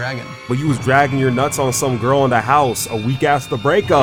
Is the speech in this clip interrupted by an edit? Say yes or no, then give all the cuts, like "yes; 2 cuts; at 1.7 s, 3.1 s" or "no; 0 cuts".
no; 0 cuts